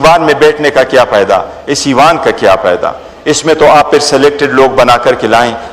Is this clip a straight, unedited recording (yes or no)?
yes